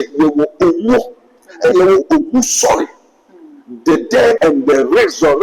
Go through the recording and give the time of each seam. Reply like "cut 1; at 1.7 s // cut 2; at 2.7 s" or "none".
cut 1; at 4.4 s